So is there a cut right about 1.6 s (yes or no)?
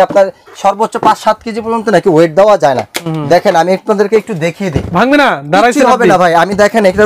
no